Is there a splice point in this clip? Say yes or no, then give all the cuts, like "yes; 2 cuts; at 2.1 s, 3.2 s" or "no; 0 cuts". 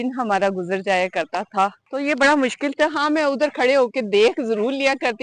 yes; 1 cut; at 1.8 s